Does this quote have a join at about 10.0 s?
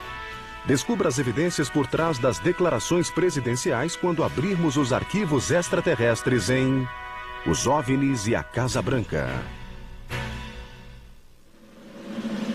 no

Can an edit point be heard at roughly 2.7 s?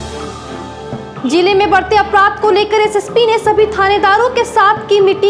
no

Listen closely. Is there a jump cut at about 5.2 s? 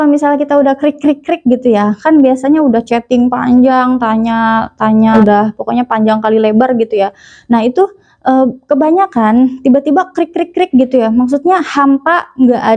yes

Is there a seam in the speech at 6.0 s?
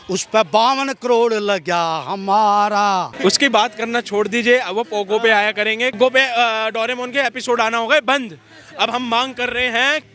yes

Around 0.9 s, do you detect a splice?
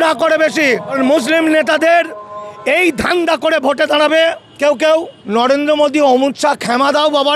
yes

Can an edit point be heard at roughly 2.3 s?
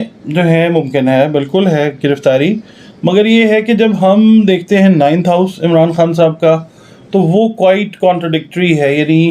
no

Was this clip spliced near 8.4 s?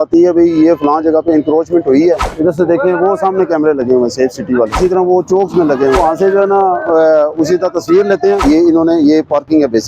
yes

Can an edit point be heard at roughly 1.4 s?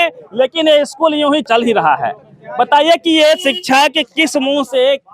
yes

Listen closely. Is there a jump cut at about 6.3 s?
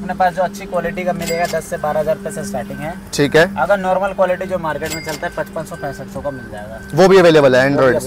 no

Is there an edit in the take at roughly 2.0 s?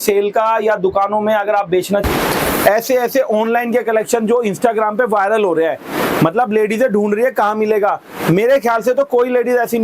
yes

